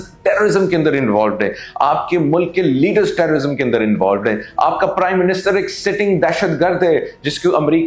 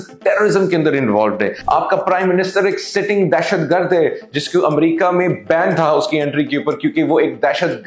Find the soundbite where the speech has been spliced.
second; 1 cut; at 1.6 s

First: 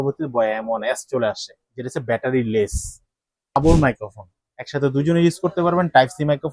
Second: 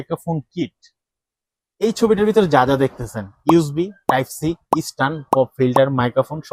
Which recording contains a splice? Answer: first; 1 cut; at 3.5 s

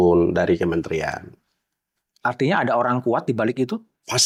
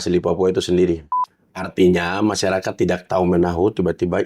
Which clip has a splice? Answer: second; 1 cut; at 1.1 s

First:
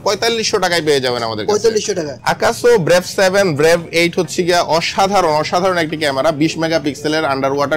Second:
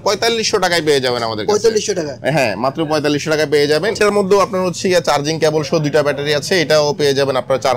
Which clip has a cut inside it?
first; 1 cut; at 2.1 s

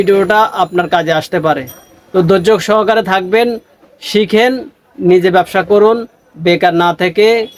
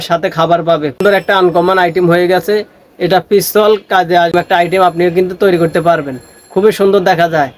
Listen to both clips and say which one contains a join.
second; 2 cuts; at 1.0 s, 4.3 s

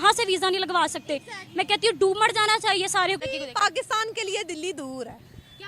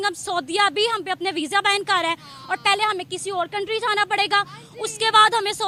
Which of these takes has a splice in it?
first; 1 cut; at 3.2 s

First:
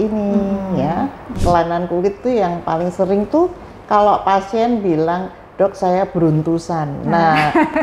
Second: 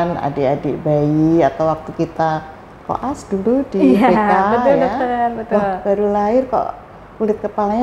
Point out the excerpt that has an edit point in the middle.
first; 1 cut; at 1.3 s

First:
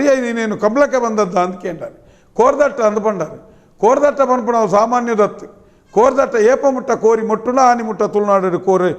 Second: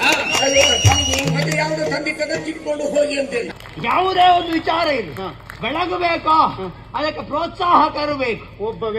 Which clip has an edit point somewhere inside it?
second; 1 cut; at 3.5 s

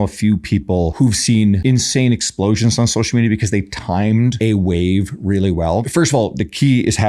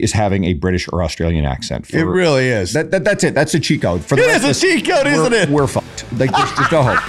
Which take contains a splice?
first; 4 cuts; at 0.9 s, 1.6 s, 4.3 s, 5.8 s

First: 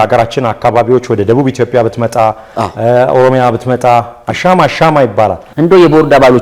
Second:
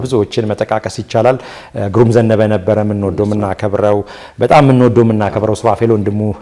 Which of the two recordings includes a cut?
first; 1 cut; at 5.4 s

